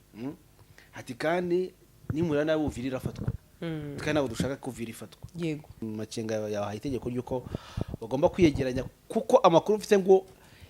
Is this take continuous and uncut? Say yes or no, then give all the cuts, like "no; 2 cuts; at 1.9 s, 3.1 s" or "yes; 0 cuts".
no; 1 cut; at 5.8 s